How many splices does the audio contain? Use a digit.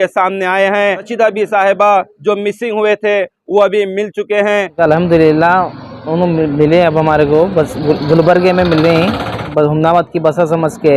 3